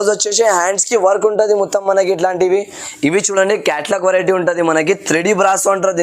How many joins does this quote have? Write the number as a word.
one